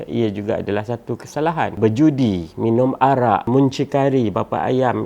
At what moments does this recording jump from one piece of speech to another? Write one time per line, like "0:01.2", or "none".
0:01.8
0:03.5